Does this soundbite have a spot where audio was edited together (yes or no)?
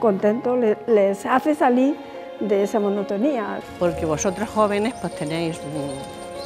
yes